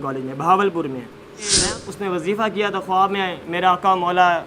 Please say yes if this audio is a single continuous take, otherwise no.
no